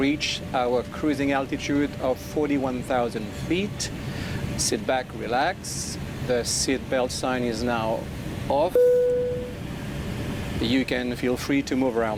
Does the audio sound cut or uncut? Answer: uncut